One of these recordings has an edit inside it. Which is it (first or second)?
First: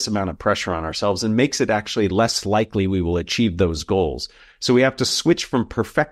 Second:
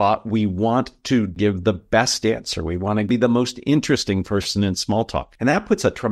second